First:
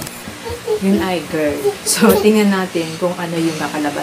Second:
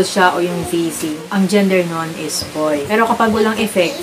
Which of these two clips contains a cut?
second; 2 cuts; at 1.2 s, 2.9 s

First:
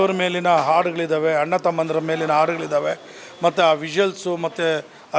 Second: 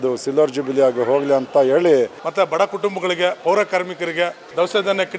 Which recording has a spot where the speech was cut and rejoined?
second; 1 cut; at 2.2 s

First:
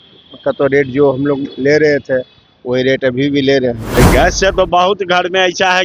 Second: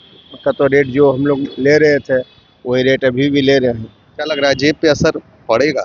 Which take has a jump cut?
first; 1 cut; at 3.8 s

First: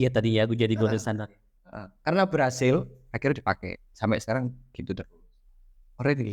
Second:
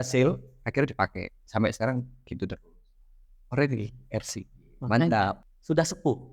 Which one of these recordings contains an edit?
second; 1 cut; at 5.4 s

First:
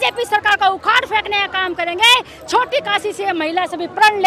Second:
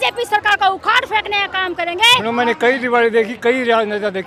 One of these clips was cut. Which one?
second; 1 cut; at 2.2 s

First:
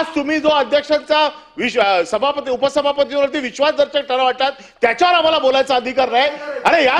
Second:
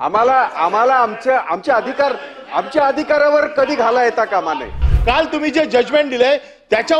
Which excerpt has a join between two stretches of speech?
second; 1 cut; at 4.9 s

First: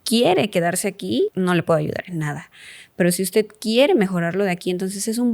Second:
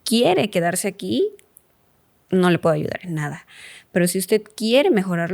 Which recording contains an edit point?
first; 1 cut; at 1.3 s

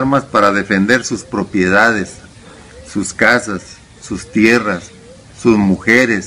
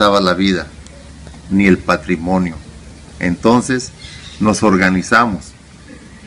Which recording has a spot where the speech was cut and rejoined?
first; 1 cut; at 3.2 s

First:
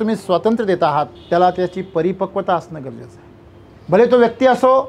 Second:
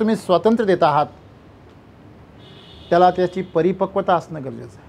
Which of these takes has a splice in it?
first; 1 cut; at 1.2 s

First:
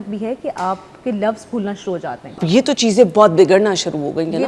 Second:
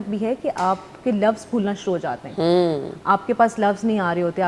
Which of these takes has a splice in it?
first; 1 cut; at 2.4 s

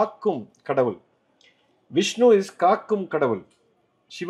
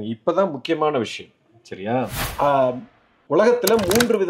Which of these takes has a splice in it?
second; 1 cut; at 2.2 s

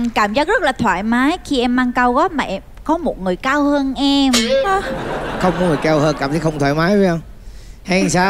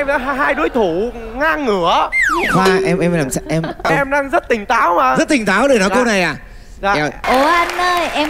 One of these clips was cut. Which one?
second; 1 cut; at 7.2 s

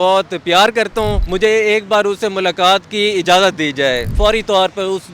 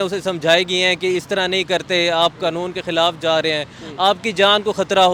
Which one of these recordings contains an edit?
first; 2 cuts; at 1.2 s, 4.1 s

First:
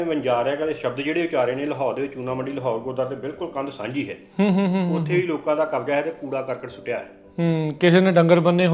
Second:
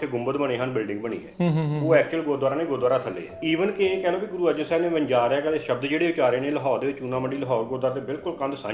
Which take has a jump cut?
second; 1 cut; at 3.4 s

